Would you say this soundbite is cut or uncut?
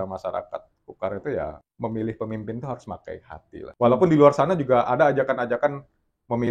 cut